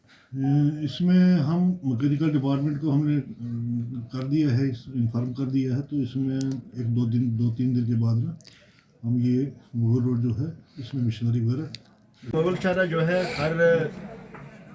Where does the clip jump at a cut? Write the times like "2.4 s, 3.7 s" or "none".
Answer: 12.3 s